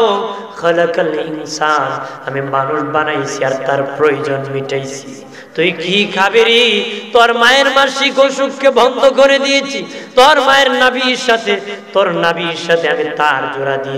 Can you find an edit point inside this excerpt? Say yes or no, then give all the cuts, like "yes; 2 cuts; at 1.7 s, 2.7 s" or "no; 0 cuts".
no; 0 cuts